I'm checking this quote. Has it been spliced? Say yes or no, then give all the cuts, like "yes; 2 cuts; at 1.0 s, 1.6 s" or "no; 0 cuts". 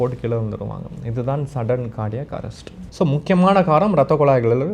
no; 0 cuts